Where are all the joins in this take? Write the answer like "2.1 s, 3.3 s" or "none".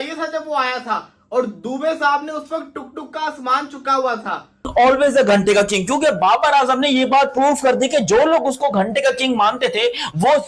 4.7 s